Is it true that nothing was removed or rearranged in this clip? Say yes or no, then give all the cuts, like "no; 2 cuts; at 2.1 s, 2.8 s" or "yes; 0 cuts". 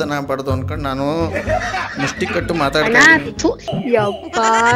no; 1 cut; at 3.7 s